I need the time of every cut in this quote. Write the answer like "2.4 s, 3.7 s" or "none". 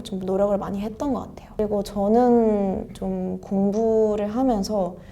1.6 s